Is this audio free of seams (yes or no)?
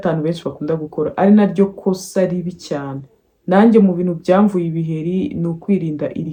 yes